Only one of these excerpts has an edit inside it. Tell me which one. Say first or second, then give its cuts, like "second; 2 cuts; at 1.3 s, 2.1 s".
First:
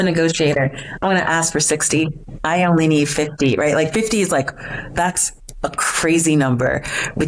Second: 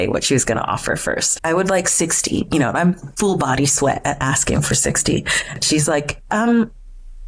second; 2 cuts; at 1.3 s, 5.4 s